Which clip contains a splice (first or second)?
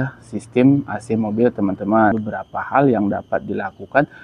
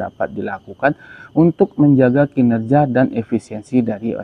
first